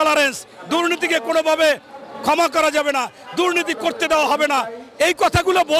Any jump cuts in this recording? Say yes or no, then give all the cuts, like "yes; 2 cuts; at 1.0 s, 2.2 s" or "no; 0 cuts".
no; 0 cuts